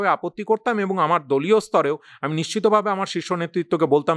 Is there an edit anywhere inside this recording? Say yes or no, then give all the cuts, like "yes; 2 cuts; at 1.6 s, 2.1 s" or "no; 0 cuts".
no; 0 cuts